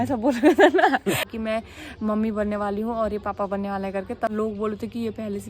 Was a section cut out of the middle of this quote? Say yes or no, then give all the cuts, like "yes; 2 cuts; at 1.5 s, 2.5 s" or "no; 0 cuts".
yes; 2 cuts; at 1.2 s, 4.3 s